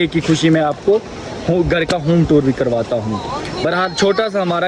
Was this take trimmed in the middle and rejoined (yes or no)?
no